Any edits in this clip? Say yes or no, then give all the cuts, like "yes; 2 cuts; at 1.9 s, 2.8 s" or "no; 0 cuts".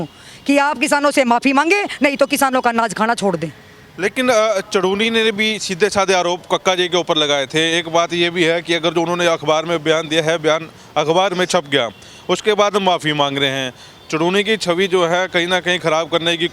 no; 0 cuts